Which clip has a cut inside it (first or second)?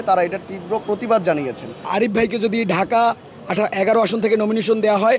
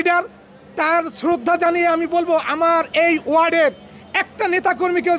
first